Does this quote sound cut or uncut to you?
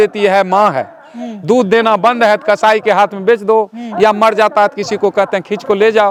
uncut